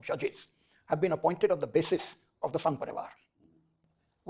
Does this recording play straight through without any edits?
yes; 0 cuts

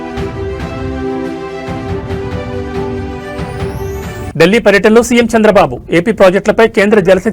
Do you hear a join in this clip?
yes; 1 cut; at 4.3 s

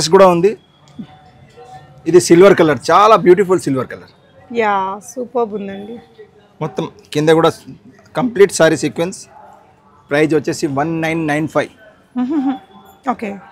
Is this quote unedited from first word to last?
yes; 0 cuts

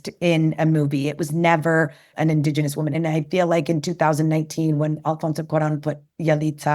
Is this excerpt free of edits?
no; 2 cuts; at 2.1 s, 2.9 s

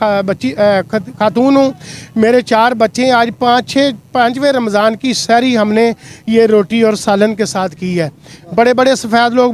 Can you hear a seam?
no; 0 cuts

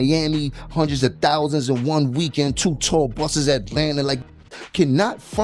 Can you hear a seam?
no; 0 cuts

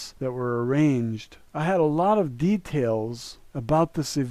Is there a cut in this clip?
yes; 1 cut; at 1.6 s

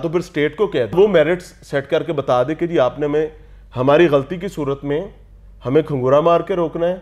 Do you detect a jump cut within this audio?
yes; 1 cut; at 0.9 s

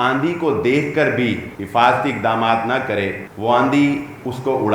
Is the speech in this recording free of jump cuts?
no; 2 cuts; at 1.5 s, 3.2 s

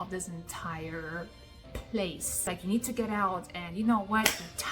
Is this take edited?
yes; 1 cut; at 2.5 s

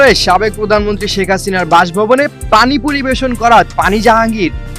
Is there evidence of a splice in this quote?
no; 0 cuts

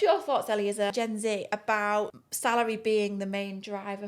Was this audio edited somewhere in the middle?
yes; 2 cuts; at 0.9 s, 2.2 s

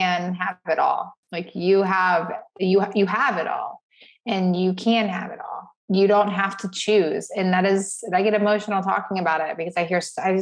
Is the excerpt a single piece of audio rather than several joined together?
yes; 0 cuts

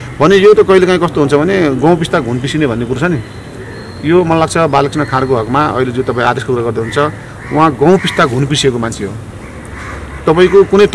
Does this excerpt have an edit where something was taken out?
no; 0 cuts

